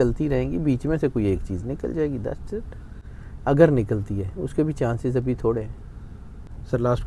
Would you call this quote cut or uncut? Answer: uncut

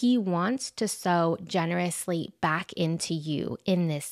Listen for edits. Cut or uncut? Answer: uncut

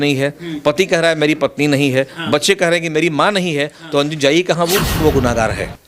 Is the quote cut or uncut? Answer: cut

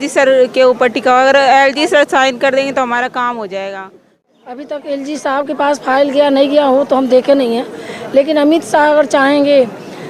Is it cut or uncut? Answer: cut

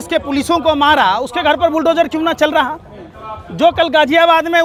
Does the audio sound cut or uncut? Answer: uncut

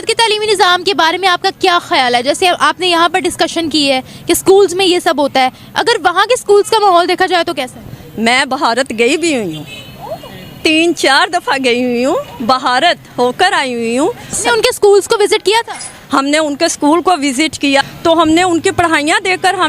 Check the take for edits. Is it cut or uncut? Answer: cut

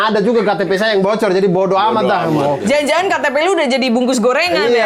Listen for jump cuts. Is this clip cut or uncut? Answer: uncut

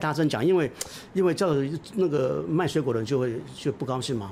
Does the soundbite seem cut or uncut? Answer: uncut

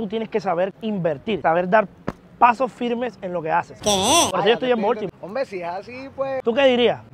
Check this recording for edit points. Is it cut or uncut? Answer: uncut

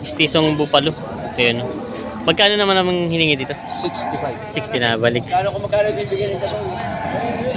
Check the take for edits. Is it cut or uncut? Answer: cut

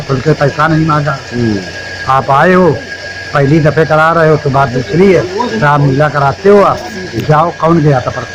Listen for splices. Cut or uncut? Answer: uncut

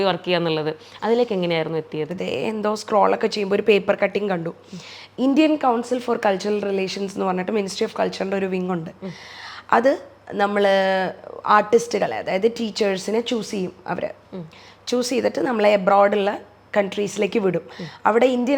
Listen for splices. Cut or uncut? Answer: cut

